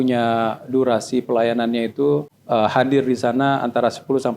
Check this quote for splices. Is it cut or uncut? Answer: cut